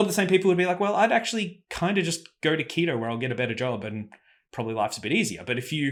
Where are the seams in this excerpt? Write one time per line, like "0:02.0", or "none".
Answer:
none